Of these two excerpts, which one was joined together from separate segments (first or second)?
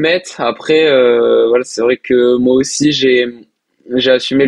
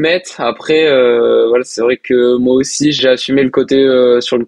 second